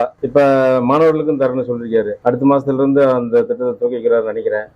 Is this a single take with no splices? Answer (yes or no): yes